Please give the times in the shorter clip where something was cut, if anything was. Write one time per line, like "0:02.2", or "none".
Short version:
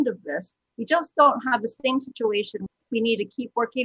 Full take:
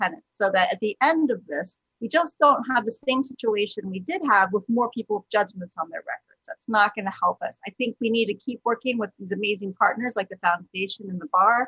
0:02.8

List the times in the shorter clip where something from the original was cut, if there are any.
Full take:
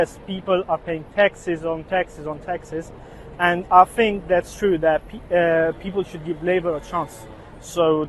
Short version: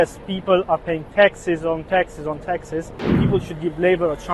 0:03.2

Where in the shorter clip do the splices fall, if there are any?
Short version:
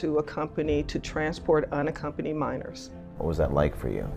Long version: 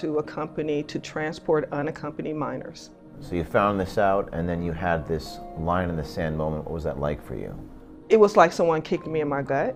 0:03.2

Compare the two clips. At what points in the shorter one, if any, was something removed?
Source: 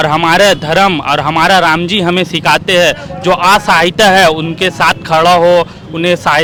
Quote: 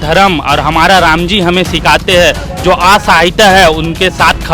none

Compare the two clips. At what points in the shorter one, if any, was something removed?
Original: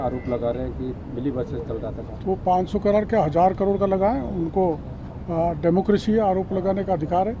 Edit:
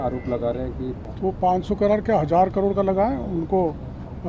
0:01.0

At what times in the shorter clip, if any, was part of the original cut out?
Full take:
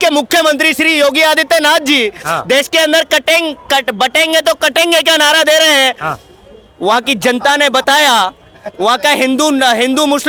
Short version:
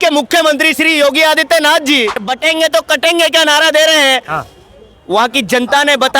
0:02.2

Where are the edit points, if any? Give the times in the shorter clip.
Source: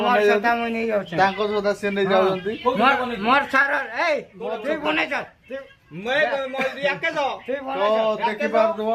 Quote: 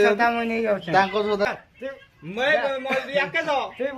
0:01.5

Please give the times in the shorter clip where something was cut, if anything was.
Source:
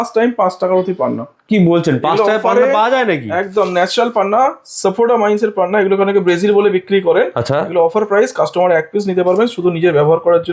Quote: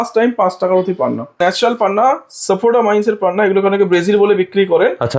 0:01.4

